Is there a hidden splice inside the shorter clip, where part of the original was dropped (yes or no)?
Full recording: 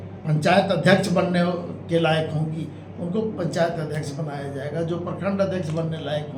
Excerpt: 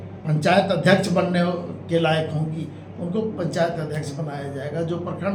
no